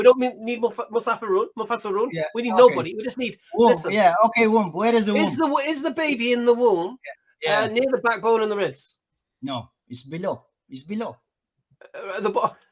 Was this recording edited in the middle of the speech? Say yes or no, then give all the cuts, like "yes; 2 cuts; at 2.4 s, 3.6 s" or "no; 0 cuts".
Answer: no; 0 cuts